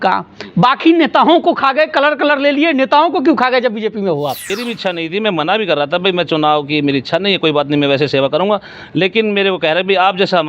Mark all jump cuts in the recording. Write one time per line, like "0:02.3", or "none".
0:04.6